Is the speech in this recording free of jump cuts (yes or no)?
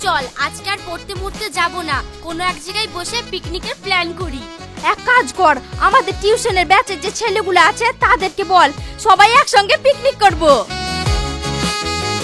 yes